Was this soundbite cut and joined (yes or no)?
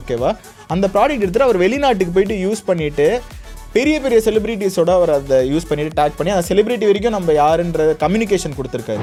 no